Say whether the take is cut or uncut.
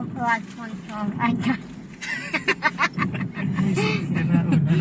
uncut